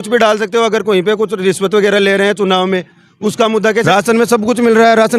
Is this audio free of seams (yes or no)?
no